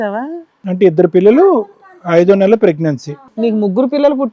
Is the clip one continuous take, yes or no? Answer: no